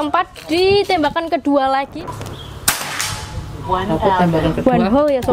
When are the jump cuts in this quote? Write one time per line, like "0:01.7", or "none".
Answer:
0:01.9